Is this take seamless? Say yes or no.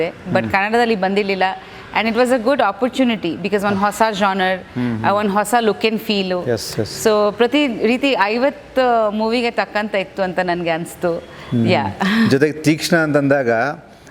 yes